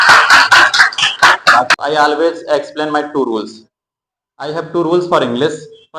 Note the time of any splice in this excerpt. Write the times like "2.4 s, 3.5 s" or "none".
1.7 s

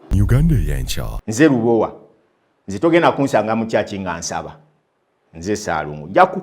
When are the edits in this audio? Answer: 1.0 s

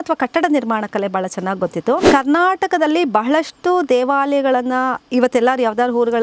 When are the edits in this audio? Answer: 2.0 s

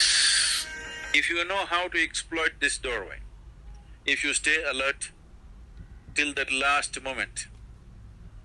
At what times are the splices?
1.1 s

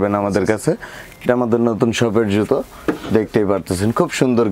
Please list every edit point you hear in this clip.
none

